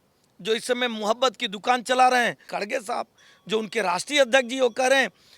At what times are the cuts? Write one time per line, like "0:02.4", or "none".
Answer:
0:02.5